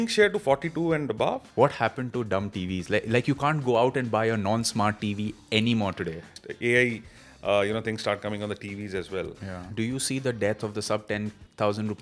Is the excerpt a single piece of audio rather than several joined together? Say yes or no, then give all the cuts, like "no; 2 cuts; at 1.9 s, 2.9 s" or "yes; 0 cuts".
no; 3 cuts; at 1.4 s, 6.2 s, 9.6 s